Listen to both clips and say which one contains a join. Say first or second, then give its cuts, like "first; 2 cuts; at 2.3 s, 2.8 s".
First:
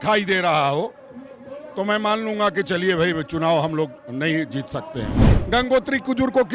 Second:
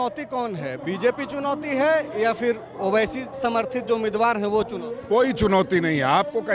first; 1 cut; at 5.3 s